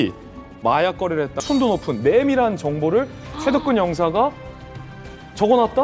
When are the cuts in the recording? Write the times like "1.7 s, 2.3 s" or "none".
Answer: 1.4 s